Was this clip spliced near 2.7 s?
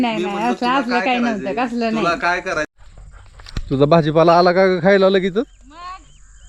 yes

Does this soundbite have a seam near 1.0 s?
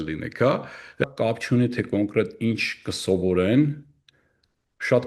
yes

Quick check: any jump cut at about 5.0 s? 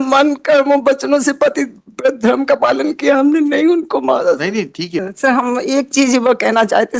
yes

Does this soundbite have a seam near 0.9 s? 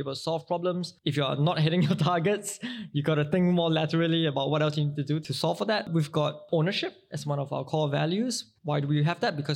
yes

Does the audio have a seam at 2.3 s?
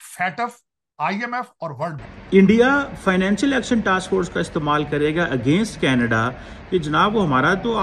yes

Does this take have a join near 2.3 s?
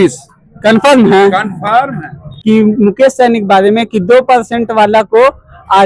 yes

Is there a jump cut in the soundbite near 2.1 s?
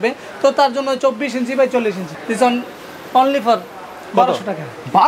yes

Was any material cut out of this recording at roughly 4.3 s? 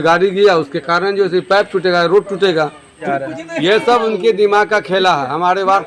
no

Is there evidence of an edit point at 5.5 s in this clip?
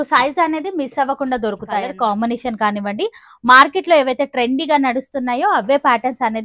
no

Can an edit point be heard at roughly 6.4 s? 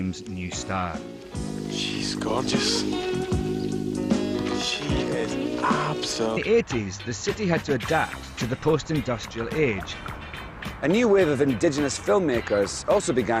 no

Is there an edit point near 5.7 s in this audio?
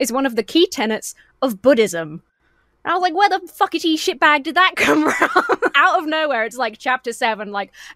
yes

